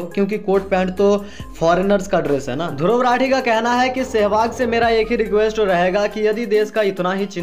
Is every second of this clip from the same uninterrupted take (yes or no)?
yes